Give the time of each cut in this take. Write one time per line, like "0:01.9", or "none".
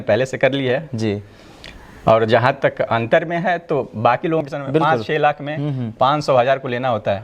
0:04.4

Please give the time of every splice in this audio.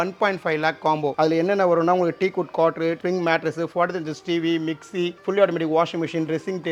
none

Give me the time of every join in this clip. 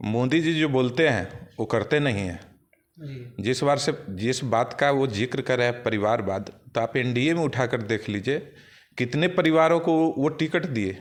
none

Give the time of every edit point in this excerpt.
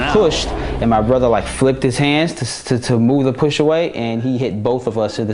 none

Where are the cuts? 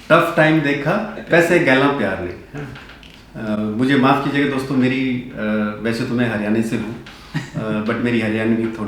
0:01.2

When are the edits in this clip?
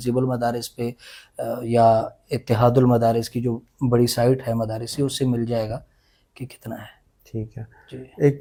none

